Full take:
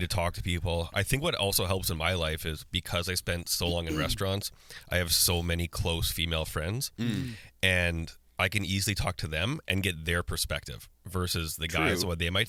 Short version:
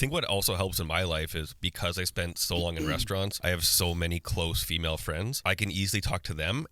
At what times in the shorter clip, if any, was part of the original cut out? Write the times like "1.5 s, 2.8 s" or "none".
3.4 s, 5.3 s